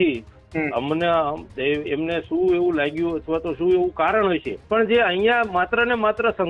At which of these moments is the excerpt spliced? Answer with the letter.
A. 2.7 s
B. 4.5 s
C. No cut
B